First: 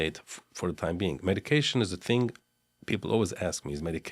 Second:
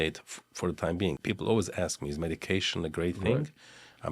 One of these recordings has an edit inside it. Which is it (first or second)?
second